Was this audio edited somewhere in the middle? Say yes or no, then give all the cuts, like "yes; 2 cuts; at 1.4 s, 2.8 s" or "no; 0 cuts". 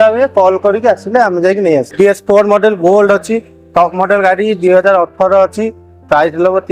yes; 1 cut; at 1.9 s